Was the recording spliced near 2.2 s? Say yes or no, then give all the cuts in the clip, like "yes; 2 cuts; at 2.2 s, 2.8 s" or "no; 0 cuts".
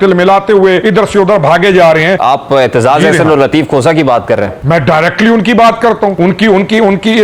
yes; 4 cuts; at 0.8 s, 2.2 s, 4.6 s, 6.1 s